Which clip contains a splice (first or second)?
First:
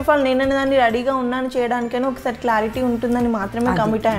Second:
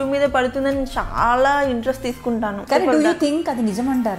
second